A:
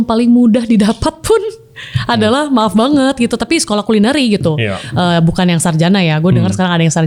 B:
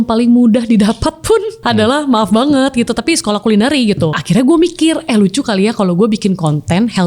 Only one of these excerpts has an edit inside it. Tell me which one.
B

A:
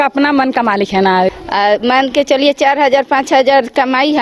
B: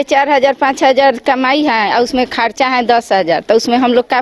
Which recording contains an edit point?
A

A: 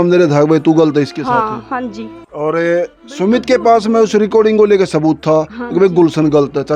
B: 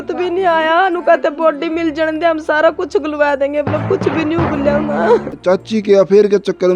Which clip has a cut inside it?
B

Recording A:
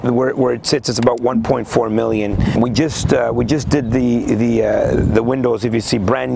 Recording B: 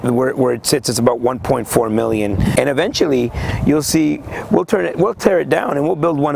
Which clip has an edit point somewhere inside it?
B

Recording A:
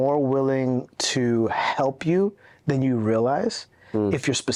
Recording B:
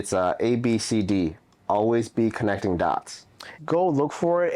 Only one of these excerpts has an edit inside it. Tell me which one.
B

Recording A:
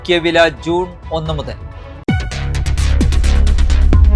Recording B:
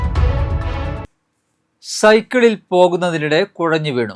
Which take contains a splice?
B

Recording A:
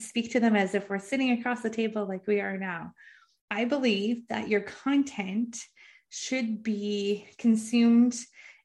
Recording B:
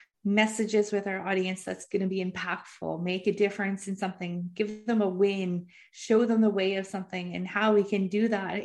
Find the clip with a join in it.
A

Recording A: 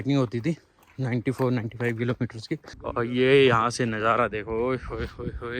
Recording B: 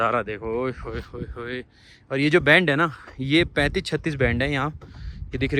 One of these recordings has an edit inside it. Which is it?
A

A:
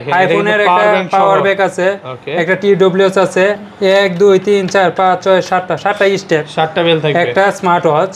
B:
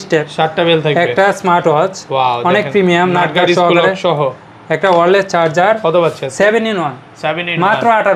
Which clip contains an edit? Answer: A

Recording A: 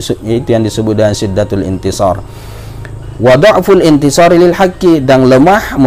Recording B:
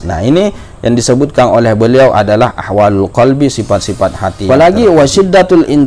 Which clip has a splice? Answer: B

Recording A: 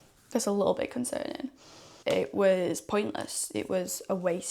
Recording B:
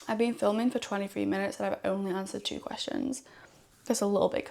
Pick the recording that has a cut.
A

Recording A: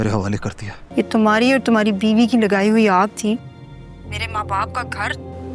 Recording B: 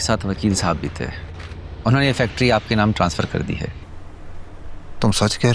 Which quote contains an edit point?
A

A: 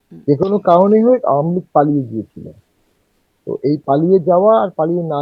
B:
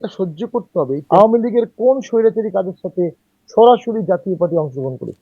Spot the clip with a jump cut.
B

